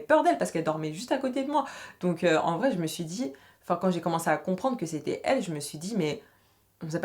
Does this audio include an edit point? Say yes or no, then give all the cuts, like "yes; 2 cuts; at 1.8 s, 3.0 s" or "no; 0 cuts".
no; 0 cuts